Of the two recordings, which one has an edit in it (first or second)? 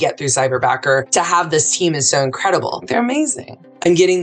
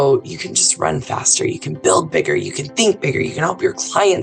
first